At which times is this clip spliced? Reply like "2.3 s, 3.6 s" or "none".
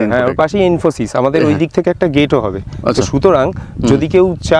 none